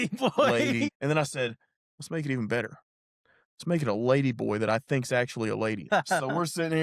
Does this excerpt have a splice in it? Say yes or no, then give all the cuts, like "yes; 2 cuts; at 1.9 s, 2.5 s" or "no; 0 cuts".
yes; 2 cuts; at 0.9 s, 5.9 s